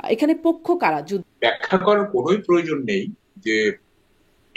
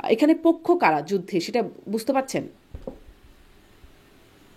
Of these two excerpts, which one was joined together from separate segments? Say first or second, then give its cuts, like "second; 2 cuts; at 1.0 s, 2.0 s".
first; 1 cut; at 1.3 s